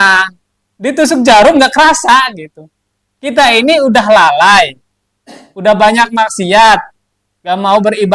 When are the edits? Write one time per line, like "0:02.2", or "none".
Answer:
none